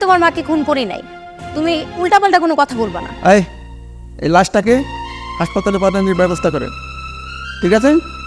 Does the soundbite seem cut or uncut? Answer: cut